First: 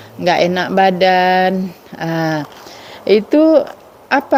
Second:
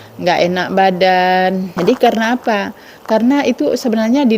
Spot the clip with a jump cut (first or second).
second